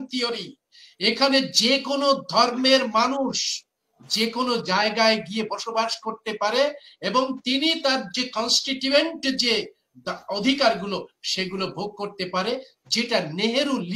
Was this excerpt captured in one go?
yes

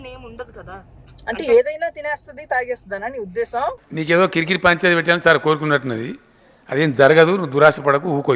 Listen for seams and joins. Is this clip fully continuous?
yes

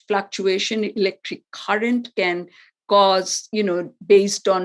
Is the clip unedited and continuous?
yes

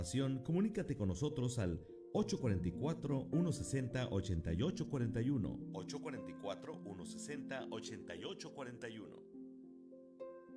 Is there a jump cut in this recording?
no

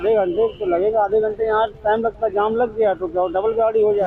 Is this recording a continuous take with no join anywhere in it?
yes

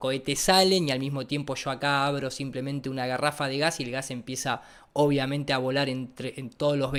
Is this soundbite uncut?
yes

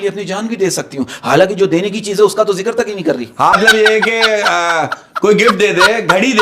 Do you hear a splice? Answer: yes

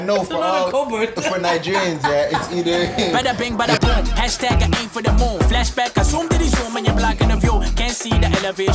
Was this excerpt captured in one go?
no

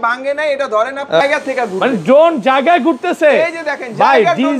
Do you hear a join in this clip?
yes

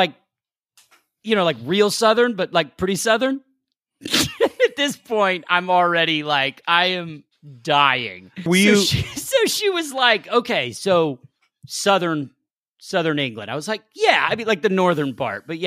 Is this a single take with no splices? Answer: no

